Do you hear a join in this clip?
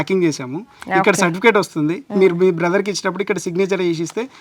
no; 0 cuts

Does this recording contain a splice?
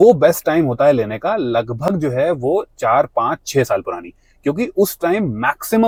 no; 0 cuts

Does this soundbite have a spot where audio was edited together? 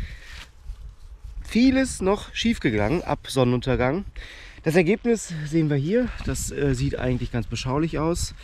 no; 0 cuts

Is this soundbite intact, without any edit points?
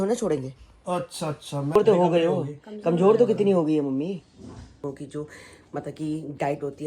no; 2 cuts; at 1.8 s, 4.8 s

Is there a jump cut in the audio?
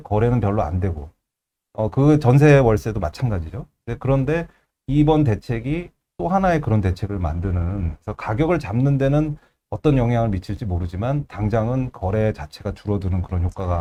no; 0 cuts

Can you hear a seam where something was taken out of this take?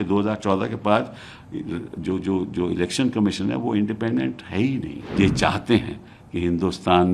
yes; 1 cut; at 5.0 s

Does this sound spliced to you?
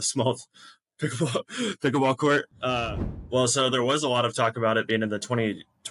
yes; 1 cut; at 3.2 s

